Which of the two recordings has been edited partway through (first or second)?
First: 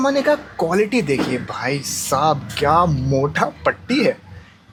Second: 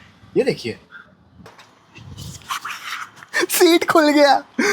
second